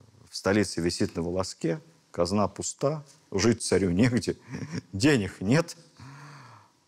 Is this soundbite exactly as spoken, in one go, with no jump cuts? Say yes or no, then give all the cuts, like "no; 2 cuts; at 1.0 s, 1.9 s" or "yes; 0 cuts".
yes; 0 cuts